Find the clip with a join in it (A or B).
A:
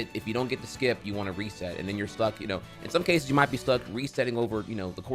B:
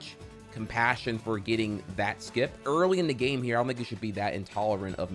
B